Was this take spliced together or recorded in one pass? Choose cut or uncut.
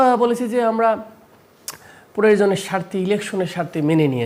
uncut